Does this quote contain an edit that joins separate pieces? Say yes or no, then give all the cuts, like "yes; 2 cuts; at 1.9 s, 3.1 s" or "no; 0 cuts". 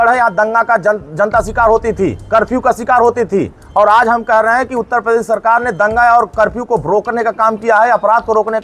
no; 0 cuts